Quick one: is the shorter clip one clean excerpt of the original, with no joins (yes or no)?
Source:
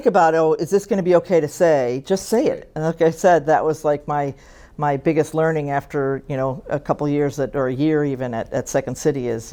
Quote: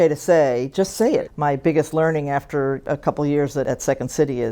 no